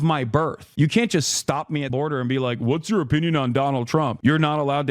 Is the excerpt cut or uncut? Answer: cut